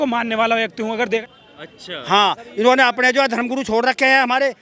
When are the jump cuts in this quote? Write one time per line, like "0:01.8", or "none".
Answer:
0:01.2